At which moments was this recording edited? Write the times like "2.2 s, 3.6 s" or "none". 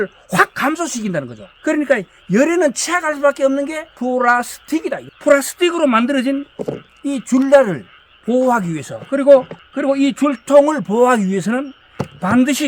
3.8 s, 5.1 s